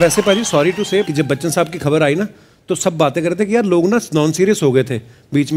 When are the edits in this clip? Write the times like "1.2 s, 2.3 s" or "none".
1.1 s